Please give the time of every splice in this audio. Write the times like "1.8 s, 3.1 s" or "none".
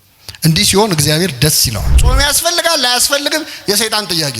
2.0 s